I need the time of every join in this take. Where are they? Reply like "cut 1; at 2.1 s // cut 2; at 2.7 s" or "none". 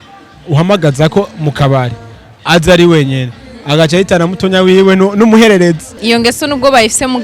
cut 1; at 5.9 s